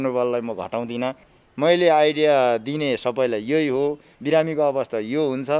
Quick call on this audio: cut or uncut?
cut